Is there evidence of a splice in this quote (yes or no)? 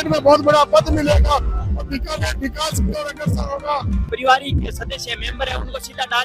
yes